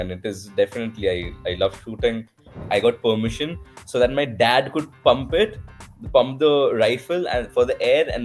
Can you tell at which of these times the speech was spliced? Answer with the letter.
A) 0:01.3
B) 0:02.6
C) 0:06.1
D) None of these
B